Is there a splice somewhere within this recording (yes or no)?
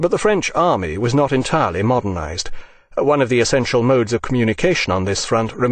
yes